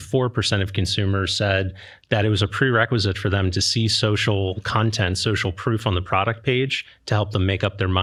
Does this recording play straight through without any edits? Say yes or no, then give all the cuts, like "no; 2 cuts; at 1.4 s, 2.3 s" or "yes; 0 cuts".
yes; 0 cuts